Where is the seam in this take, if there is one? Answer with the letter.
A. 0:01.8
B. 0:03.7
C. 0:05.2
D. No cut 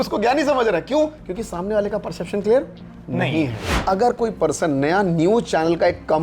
B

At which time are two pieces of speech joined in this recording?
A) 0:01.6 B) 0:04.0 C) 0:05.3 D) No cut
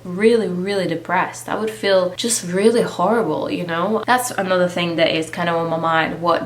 B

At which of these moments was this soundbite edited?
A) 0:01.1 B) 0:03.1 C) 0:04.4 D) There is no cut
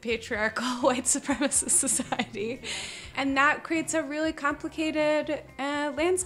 B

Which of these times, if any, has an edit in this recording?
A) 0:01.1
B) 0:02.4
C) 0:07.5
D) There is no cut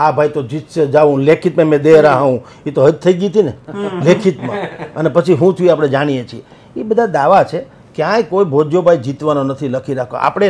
D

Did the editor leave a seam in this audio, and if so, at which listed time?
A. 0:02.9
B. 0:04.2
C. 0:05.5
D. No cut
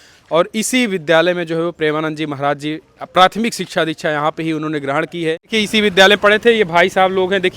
C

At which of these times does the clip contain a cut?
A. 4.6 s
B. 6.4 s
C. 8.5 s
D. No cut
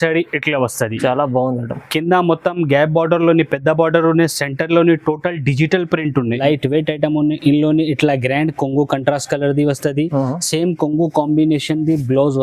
B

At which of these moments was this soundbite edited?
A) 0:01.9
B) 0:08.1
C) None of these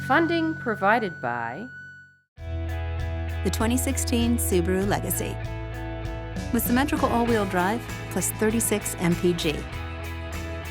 A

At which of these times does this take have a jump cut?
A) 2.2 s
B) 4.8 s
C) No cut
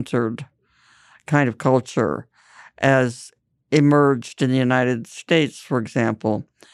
C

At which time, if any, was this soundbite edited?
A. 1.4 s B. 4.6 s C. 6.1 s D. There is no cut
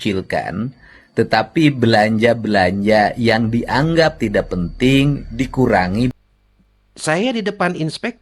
C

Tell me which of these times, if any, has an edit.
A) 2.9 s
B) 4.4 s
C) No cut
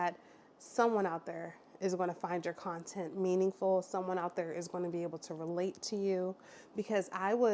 C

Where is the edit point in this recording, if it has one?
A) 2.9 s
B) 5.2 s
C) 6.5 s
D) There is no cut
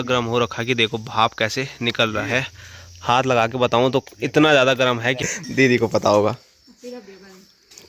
B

